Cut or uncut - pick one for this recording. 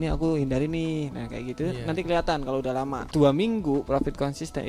cut